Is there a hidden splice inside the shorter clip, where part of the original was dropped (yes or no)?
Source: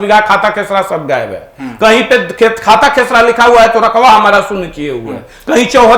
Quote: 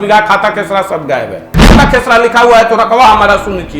yes